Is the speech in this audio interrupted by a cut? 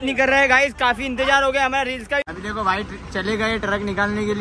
yes; 1 cut; at 2.3 s

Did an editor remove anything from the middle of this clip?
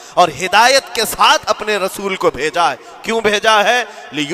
no; 0 cuts

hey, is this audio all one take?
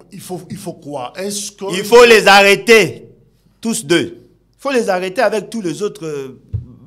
yes; 0 cuts

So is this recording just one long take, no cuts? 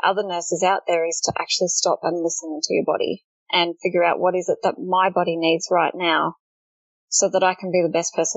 yes; 0 cuts

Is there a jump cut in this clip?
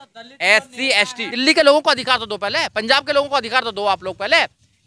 yes; 1 cut; at 1.3 s

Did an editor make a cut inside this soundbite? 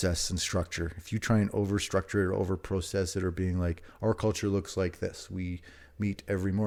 no; 0 cuts

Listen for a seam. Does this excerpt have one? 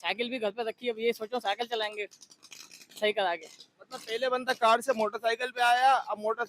no; 0 cuts

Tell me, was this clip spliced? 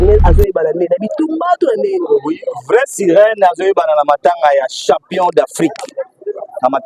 no; 0 cuts

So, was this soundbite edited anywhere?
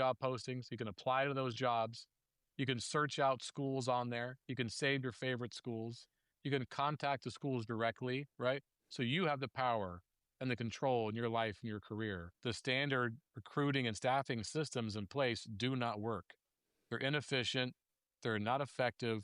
yes; 1 cut; at 12.3 s

